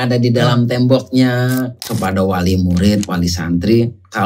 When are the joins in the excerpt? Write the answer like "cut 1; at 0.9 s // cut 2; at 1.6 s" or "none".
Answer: cut 1; at 1.8 s